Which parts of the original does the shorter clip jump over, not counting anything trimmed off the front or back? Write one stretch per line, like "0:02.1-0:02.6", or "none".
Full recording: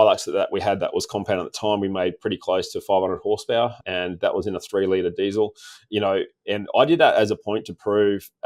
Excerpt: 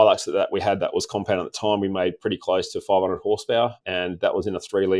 none